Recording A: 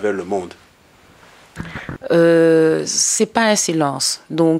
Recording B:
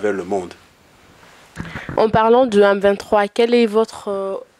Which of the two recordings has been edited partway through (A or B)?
A